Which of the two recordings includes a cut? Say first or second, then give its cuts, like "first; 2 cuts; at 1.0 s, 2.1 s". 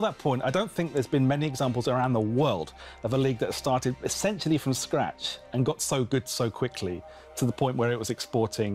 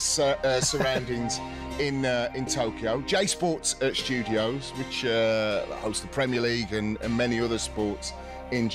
first; 1 cut; at 4.2 s